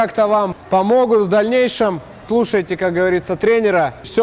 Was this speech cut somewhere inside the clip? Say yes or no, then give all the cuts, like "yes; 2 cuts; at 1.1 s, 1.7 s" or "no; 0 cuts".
yes; 1 cut; at 2.2 s